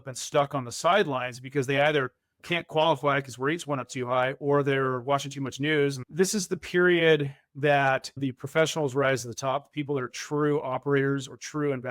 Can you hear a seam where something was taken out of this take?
yes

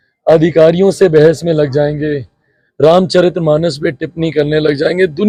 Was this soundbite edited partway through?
no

